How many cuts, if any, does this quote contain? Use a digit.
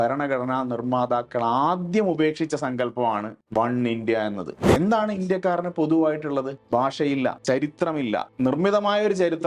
5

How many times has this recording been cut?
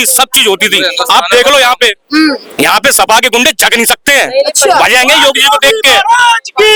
0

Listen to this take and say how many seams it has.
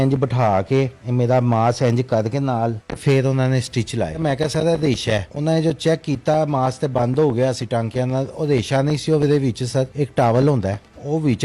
4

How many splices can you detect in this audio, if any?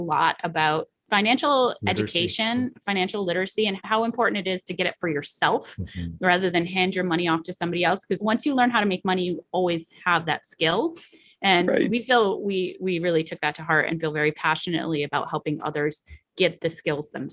2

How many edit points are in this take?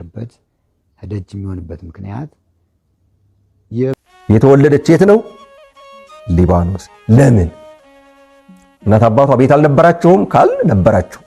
1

